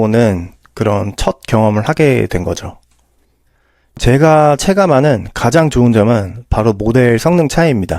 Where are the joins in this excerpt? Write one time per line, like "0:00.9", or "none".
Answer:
0:04.0